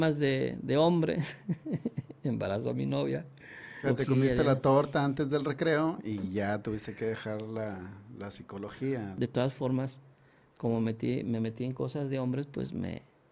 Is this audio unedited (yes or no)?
no